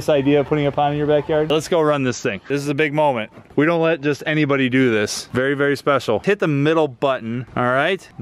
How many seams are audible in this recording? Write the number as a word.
three